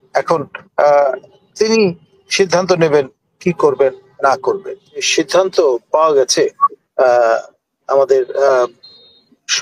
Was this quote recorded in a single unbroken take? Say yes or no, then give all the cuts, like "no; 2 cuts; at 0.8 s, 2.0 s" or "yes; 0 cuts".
no; 1 cut; at 5.1 s